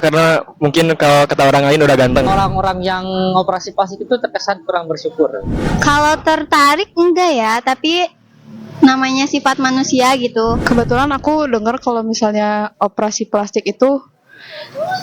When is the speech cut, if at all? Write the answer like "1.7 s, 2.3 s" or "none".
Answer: 2.3 s, 5.7 s, 10.6 s